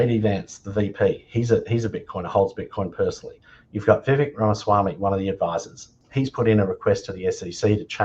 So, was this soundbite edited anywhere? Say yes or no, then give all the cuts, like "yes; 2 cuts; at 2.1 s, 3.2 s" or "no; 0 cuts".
yes; 1 cut; at 6.0 s